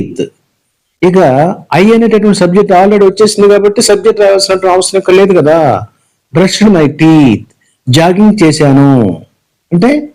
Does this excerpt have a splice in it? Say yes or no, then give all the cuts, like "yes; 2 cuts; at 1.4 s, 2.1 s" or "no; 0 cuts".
no; 0 cuts